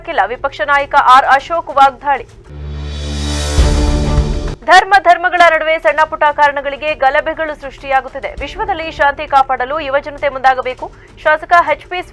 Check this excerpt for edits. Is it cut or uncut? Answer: uncut